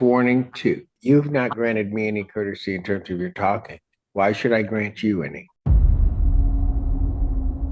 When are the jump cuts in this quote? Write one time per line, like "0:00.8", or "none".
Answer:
0:01.0
0:05.5